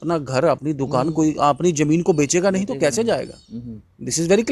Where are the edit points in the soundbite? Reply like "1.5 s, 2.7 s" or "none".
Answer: none